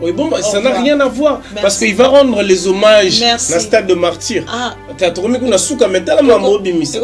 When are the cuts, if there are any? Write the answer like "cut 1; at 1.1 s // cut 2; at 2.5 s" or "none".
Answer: none